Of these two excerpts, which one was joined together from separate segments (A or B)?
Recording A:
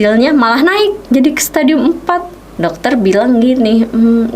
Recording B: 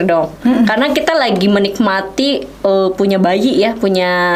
A